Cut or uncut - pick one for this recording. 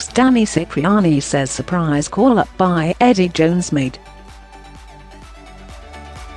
cut